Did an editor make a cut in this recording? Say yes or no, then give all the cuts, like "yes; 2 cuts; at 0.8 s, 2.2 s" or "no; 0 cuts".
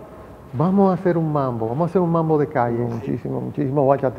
yes; 1 cut; at 2.9 s